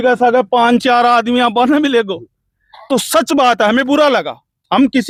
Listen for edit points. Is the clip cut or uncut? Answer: uncut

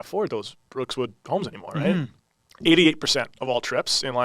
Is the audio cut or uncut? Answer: cut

